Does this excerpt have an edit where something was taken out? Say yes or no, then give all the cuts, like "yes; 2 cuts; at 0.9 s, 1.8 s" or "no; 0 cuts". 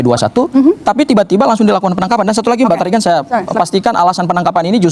no; 0 cuts